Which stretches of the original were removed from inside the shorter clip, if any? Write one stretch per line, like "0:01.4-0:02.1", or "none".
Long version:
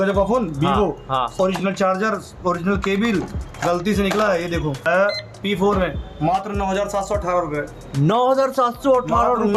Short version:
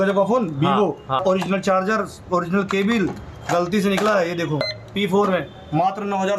0:01.2-0:01.3
0:04.8-0:05.1